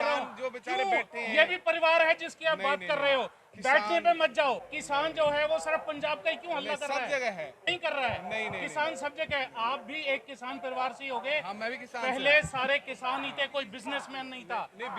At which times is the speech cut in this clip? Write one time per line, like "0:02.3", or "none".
0:04.7
0:07.6